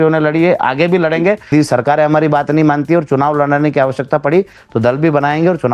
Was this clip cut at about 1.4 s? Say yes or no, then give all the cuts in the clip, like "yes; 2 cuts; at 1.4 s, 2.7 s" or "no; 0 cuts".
yes; 1 cut; at 1.4 s